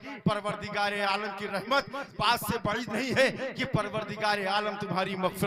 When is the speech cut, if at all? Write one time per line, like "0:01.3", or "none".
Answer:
0:02.1